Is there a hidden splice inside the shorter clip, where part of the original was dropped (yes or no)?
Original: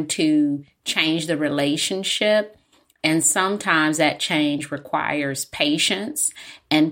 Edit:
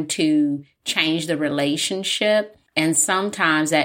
yes